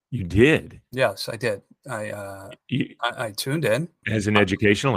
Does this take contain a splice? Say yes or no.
yes